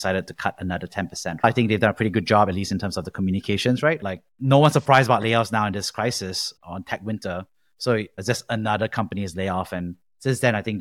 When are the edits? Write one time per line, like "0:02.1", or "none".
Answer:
0:01.4
0:04.0